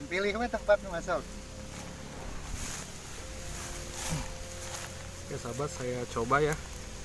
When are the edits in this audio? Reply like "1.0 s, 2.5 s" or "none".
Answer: none